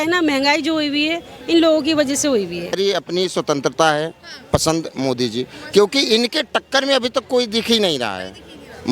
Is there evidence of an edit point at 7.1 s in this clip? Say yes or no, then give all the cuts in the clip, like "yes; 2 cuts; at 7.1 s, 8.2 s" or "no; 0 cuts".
no; 1 cut; at 2.7 s